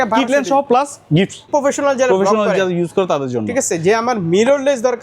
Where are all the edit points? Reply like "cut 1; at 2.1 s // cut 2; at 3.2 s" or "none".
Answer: cut 1; at 1.5 s